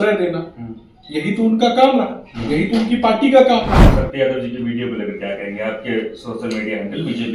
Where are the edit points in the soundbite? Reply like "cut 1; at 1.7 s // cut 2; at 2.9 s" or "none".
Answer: cut 1; at 3.9 s